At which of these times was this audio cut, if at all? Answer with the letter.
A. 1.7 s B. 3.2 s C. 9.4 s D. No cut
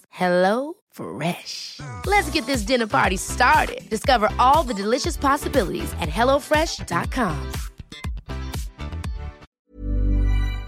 C